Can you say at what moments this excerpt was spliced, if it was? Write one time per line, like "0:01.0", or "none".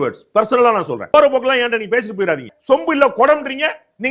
0:01.1
0:02.5